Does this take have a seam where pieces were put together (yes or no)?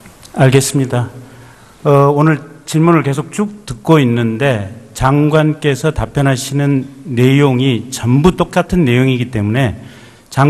yes